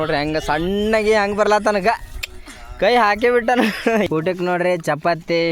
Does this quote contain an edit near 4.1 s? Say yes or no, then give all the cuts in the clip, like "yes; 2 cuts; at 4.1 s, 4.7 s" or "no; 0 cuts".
yes; 1 cut; at 4.1 s